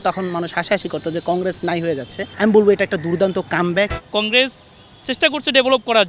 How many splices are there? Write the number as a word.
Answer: one